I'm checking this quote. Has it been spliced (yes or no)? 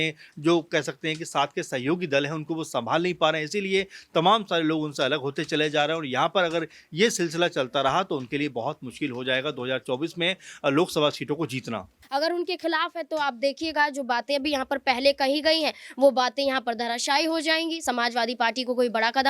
yes